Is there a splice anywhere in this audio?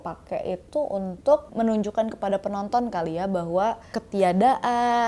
yes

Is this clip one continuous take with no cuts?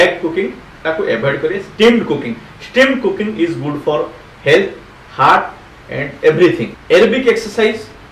no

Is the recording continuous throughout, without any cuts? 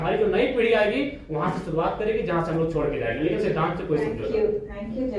yes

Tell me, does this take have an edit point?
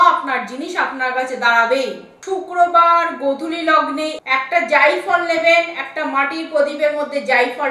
yes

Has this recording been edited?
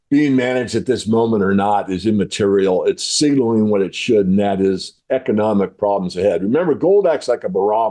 no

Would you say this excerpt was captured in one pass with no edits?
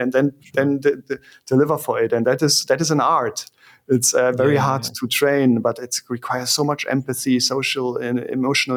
yes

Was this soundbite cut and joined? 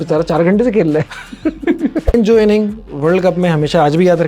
yes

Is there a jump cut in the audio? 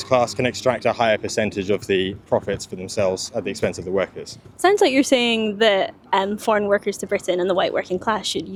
no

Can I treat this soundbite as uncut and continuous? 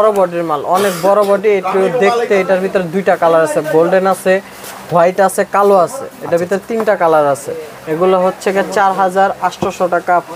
yes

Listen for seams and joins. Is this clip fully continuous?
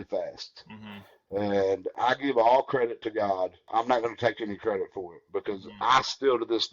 no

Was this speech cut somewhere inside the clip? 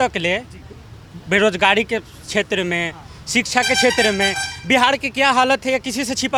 no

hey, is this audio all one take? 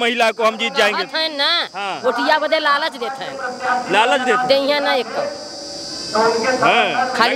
yes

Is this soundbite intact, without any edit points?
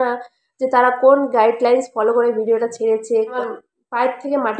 no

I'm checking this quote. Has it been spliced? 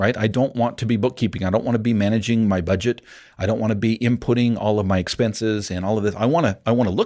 no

